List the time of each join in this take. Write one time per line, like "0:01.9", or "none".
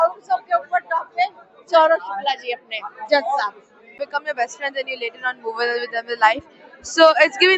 0:04.0